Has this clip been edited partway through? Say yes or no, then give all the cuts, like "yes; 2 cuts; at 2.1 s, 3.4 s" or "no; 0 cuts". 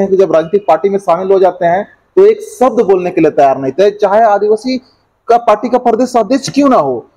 no; 0 cuts